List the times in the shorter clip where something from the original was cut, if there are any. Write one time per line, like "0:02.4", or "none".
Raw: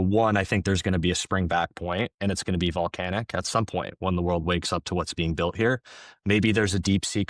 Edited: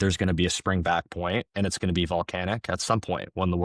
none